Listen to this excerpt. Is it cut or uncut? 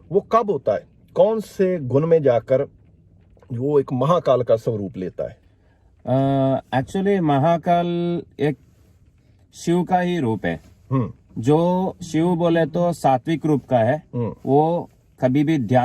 uncut